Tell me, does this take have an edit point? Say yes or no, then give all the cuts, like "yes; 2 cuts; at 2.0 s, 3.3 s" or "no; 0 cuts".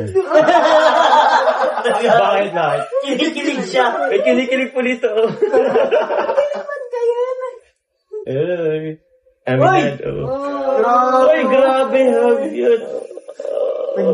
no; 0 cuts